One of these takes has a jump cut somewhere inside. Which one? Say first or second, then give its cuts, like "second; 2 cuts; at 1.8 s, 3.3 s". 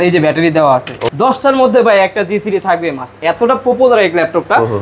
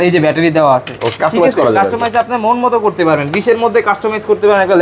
first; 1 cut; at 1.0 s